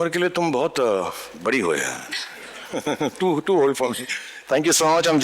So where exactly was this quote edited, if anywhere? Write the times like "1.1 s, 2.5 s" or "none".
none